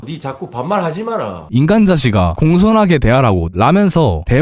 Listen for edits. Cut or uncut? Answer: cut